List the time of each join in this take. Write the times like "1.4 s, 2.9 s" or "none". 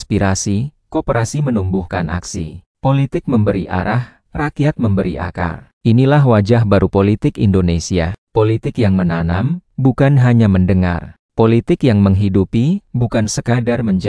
none